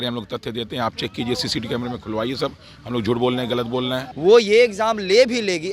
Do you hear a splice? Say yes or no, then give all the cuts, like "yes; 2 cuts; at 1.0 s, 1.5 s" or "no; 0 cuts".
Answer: yes; 1 cut; at 4.1 s